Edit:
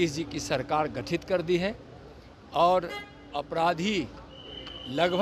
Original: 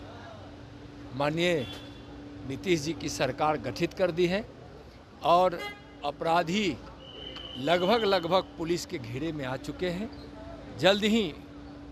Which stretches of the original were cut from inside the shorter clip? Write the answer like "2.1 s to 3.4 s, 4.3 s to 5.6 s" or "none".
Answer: none